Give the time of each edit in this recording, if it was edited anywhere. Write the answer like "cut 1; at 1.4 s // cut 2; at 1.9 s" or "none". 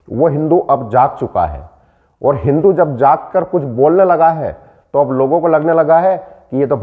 none